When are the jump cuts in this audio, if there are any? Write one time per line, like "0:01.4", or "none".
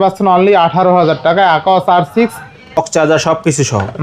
0:02.8